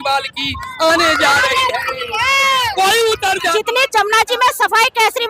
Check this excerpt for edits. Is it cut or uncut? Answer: cut